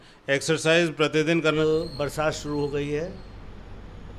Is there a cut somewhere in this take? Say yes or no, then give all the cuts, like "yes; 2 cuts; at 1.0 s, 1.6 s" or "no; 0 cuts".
yes; 1 cut; at 1.6 s